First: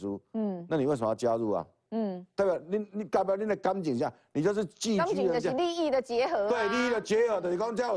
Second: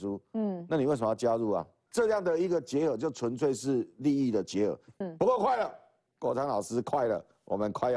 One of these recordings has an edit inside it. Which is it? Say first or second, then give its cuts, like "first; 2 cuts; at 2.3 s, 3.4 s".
second; 2 cuts; at 1.8 s, 5.0 s